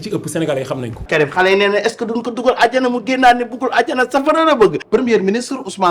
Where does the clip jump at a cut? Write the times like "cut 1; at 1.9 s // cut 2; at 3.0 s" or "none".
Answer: cut 1; at 1.2 s // cut 2; at 4.8 s